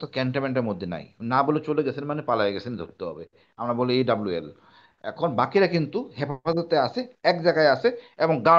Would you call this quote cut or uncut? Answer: uncut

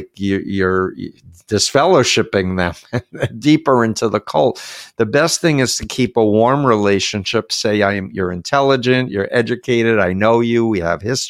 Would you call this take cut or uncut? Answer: uncut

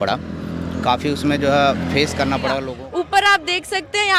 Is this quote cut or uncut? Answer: cut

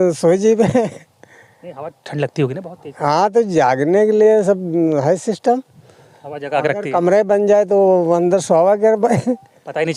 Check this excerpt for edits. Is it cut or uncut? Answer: uncut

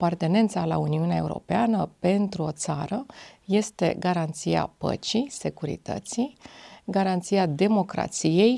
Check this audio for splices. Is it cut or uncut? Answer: uncut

